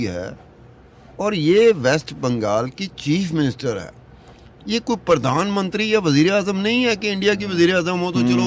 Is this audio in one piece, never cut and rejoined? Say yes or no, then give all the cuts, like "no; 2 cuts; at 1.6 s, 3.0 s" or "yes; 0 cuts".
yes; 0 cuts